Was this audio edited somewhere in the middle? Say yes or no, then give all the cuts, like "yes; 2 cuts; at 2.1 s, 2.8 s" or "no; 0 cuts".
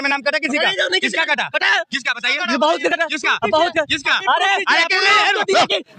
no; 0 cuts